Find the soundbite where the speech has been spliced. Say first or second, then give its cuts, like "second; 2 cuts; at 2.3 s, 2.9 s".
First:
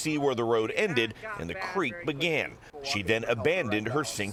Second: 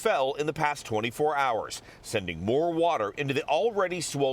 second; 1 cut; at 2.3 s